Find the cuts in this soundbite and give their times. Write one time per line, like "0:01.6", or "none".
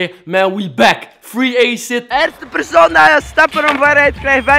0:02.1